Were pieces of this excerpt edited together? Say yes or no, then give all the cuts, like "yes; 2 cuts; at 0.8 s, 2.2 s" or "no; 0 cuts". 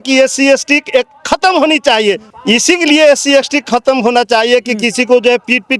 yes; 1 cut; at 2.3 s